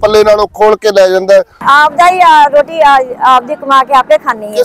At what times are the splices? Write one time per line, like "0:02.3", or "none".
0:01.6